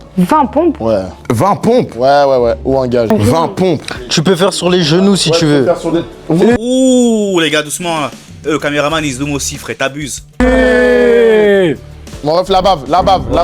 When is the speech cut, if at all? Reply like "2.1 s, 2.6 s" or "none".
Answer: 3.1 s